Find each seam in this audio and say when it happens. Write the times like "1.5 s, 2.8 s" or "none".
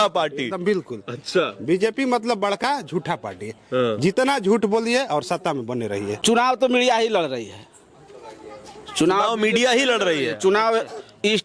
6.2 s